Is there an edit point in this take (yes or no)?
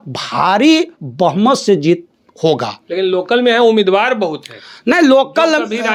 no